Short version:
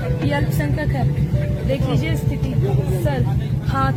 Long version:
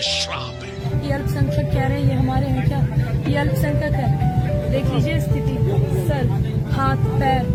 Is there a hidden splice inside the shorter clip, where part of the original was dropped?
no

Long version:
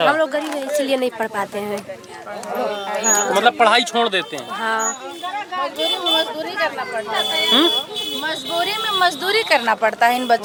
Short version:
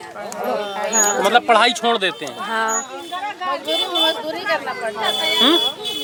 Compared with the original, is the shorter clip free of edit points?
yes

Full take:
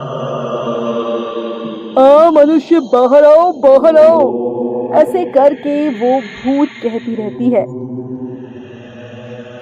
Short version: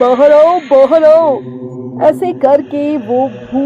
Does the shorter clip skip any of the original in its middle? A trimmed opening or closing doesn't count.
no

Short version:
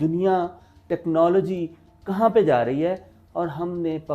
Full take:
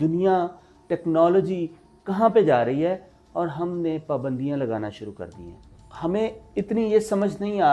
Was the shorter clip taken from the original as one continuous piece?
yes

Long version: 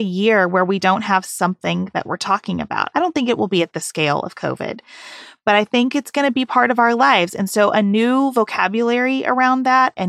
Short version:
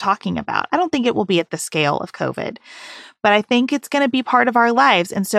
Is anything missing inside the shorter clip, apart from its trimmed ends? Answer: no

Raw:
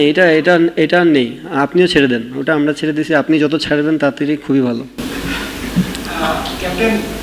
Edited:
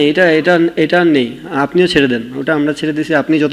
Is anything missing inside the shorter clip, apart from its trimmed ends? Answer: no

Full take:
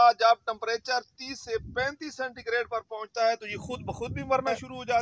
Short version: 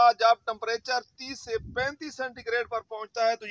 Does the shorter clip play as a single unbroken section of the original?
yes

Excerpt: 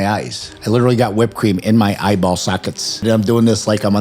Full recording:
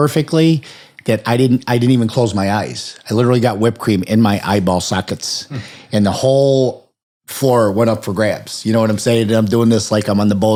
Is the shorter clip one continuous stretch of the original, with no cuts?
no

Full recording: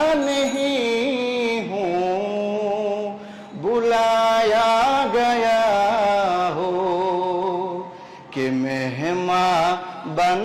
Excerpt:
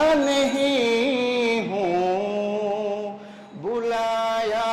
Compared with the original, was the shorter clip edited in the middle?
no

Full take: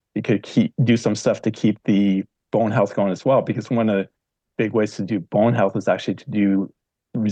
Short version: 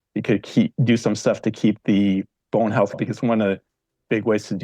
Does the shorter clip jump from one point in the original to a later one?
yes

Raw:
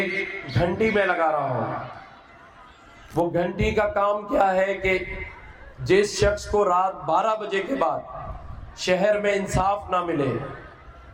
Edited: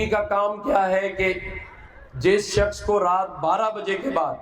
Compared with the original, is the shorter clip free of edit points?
yes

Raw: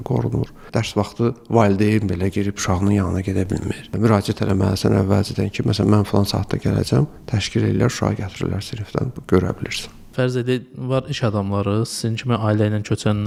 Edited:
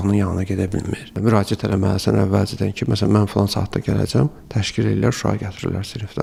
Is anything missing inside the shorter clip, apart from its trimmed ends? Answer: no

